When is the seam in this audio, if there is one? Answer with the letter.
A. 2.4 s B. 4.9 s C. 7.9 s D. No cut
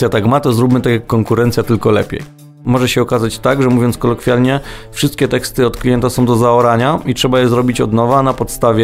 A